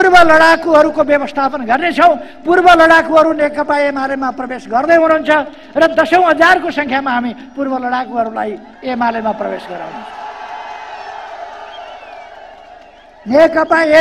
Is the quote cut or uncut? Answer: uncut